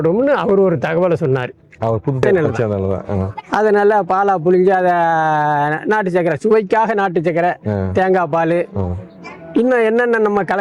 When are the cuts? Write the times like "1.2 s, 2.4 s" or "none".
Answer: 2.2 s